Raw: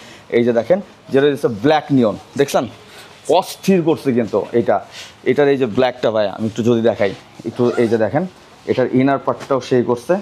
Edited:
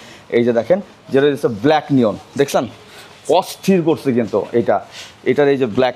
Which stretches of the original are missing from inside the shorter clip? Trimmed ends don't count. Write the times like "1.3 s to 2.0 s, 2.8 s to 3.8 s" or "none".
none